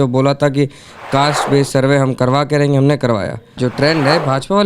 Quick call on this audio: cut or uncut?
cut